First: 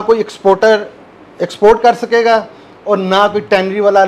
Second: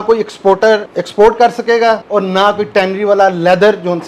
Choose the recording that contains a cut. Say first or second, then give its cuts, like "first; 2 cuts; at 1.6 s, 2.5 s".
second; 2 cuts; at 1.0 s, 2.0 s